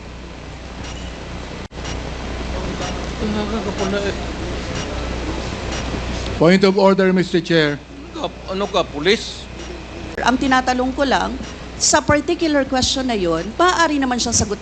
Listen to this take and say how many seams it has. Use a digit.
1